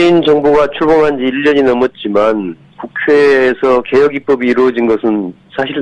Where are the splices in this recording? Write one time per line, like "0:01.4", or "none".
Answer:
none